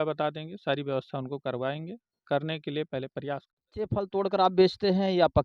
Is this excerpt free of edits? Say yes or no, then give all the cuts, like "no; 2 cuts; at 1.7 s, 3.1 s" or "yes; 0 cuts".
no; 1 cut; at 3.9 s